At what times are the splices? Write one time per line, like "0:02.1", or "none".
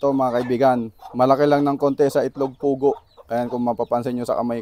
none